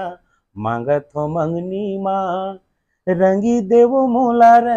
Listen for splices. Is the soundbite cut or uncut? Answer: uncut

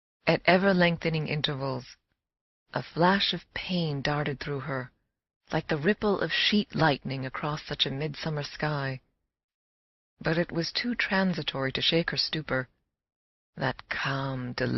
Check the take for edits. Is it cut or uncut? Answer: cut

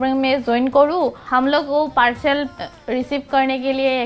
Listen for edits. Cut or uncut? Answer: cut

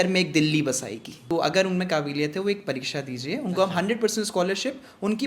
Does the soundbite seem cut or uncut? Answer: cut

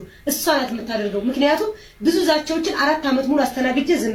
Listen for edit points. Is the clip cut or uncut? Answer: uncut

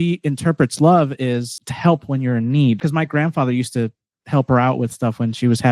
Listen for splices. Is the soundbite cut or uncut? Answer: cut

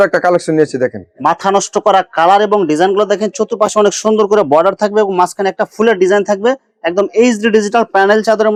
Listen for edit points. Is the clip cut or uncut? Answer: uncut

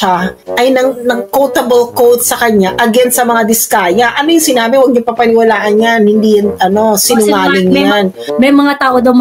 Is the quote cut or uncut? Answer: uncut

